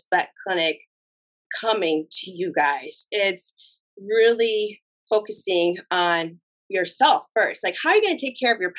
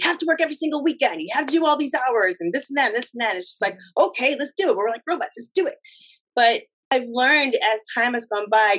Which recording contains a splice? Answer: second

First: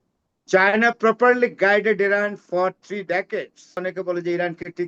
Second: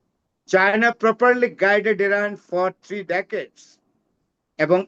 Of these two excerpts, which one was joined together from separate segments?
first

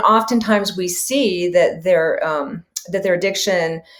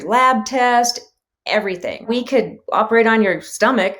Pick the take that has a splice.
second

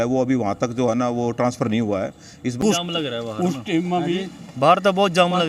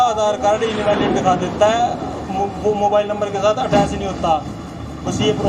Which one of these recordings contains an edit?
first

